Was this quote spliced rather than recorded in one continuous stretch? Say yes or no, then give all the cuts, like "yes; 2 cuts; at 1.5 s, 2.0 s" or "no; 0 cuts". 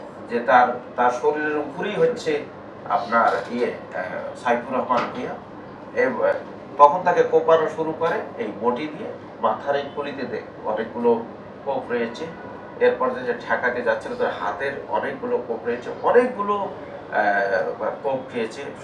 no; 0 cuts